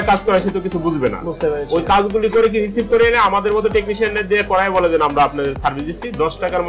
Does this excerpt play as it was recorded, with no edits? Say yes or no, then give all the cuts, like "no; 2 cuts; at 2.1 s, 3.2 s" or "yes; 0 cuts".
yes; 0 cuts